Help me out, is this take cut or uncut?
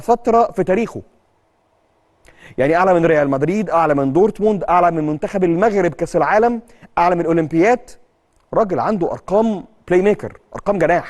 uncut